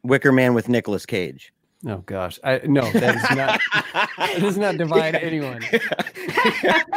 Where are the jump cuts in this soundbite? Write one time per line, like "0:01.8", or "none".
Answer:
none